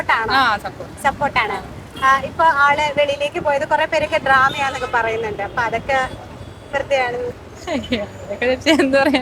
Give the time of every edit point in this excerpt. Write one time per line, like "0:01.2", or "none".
none